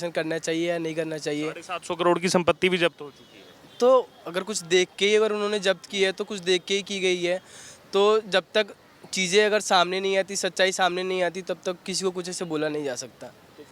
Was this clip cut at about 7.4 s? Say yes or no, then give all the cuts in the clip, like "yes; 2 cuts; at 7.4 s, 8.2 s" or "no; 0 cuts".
no; 0 cuts